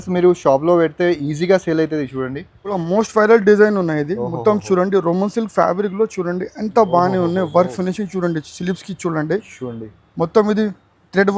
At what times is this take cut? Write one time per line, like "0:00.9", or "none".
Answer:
0:02.8